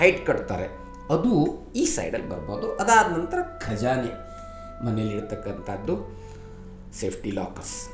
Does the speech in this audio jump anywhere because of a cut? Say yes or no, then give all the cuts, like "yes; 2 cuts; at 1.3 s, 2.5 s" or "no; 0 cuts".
no; 0 cuts